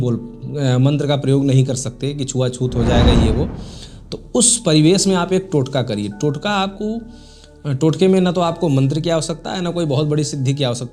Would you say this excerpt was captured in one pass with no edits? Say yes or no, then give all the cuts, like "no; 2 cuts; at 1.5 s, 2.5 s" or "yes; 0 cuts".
yes; 0 cuts